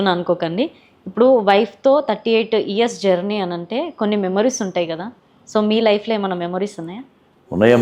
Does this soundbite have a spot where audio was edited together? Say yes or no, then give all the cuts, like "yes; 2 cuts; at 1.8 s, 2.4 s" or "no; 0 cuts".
no; 0 cuts